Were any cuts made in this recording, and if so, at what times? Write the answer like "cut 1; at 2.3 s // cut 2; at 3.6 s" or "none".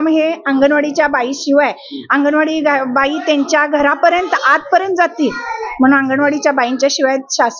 none